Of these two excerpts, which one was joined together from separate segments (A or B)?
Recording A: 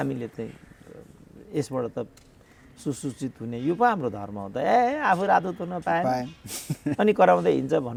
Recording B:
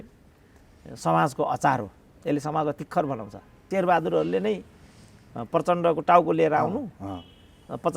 B